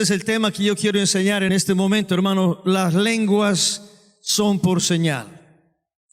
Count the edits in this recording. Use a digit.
1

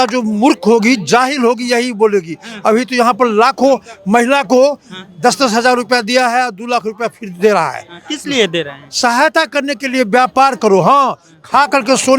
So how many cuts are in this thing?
0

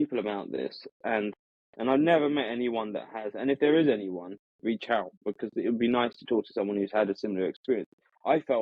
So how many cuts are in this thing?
0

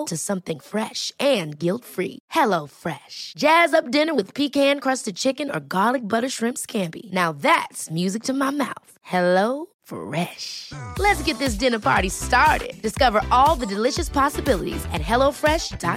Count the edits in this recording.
0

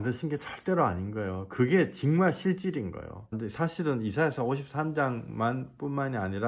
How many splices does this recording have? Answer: 1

